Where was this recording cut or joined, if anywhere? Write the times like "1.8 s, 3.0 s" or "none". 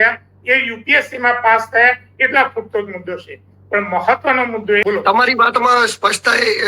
4.8 s